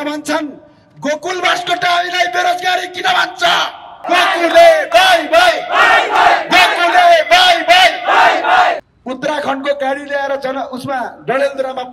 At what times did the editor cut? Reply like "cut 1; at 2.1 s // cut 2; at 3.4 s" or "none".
cut 1; at 4.0 s // cut 2; at 8.8 s

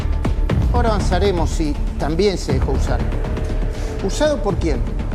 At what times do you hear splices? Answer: none

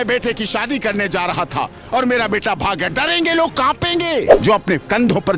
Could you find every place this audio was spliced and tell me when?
cut 1; at 4.3 s

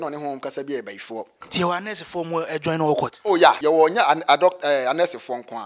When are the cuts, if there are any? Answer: cut 1; at 1.4 s // cut 2; at 3.6 s

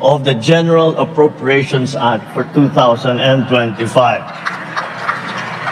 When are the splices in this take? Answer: none

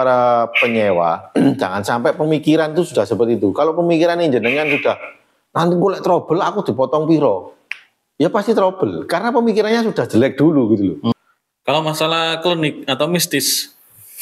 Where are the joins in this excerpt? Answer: cut 1; at 11.1 s

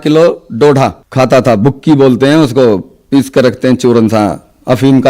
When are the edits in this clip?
cut 1; at 1.0 s

